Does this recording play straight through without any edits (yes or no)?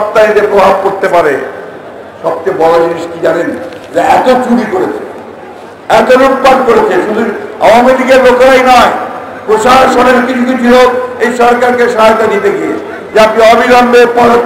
no